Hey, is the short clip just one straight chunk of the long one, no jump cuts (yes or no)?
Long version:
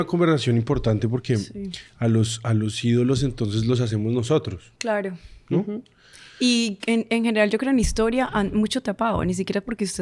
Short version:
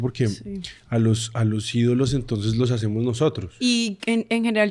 no